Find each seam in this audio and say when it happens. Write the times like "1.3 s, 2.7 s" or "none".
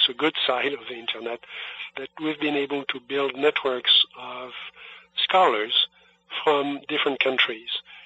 2.0 s